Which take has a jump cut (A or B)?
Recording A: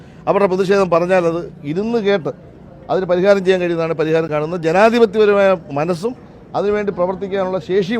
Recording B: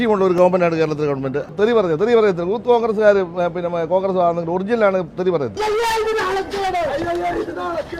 B